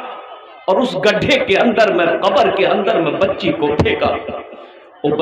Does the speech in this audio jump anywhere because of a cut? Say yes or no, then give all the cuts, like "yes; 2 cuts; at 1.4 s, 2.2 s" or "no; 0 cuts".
no; 0 cuts